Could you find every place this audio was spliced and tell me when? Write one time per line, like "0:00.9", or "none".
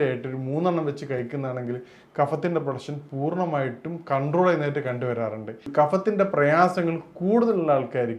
0:05.6